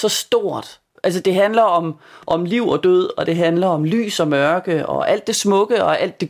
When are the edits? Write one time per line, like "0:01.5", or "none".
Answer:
0:00.9
0:02.2